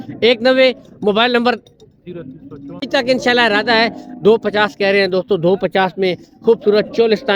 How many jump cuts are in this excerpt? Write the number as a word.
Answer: one